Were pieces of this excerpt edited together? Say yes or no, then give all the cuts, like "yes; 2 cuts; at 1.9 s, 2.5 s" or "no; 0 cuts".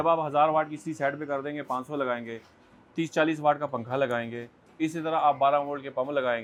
no; 0 cuts